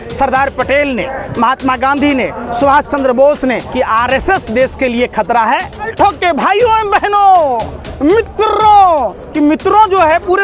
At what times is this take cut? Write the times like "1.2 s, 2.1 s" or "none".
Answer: 3.7 s, 5.9 s, 9.2 s